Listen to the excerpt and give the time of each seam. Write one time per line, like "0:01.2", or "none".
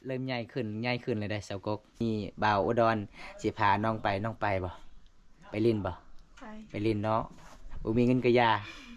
0:02.0

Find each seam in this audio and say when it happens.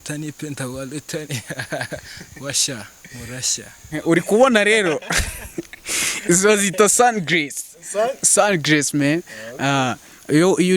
0:04.0

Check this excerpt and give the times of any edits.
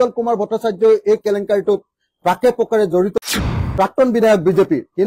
0:03.4

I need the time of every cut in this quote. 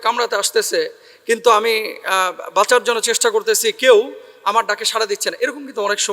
none

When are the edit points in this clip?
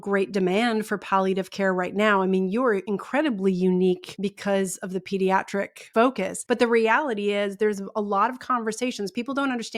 0:02.9
0:04.1
0:06.2

